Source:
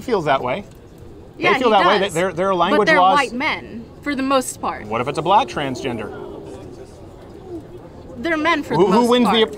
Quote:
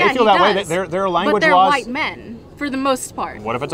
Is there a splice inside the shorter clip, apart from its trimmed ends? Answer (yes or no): no